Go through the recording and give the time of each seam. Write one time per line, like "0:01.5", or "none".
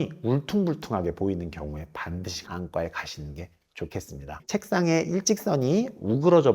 0:04.4

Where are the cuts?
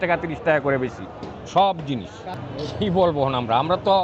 0:02.2

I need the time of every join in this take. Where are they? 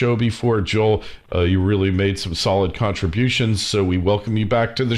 0:02.9

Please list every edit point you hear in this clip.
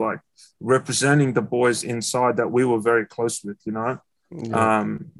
none

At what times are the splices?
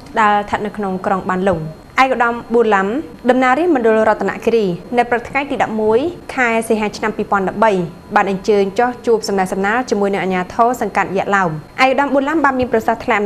0:01.8
0:03.1
0:04.8
0:06.2
0:11.6

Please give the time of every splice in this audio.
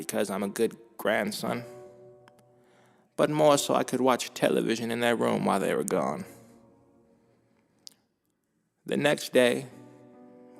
0:09.2

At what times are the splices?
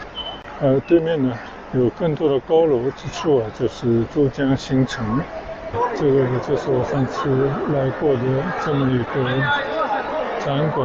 0:05.6

